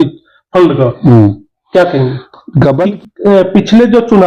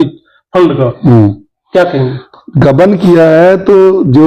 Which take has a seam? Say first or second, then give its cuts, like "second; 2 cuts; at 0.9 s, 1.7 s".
first; 1 cut; at 2.8 s